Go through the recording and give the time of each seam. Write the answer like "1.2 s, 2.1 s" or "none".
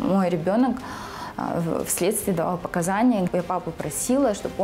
3.3 s